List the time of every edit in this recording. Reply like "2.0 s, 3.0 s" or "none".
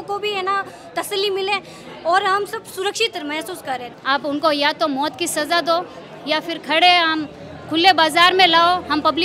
3.9 s